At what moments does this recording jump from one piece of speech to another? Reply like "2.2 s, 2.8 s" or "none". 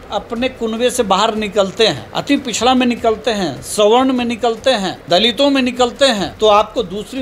2.1 s, 4.9 s, 6.3 s